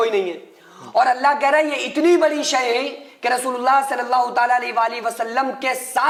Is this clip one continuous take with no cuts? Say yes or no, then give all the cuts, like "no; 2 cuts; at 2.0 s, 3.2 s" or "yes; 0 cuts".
yes; 0 cuts